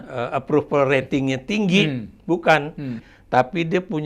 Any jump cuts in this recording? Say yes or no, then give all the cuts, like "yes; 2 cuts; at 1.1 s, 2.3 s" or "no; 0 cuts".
yes; 1 cut; at 3.0 s